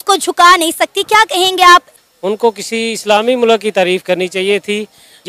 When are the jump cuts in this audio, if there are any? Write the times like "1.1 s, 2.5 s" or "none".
2.0 s